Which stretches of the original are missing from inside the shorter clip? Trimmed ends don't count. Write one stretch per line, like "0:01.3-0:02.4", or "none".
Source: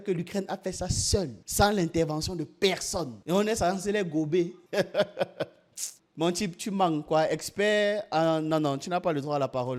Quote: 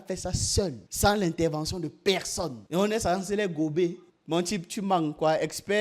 0:04.6-0:05.9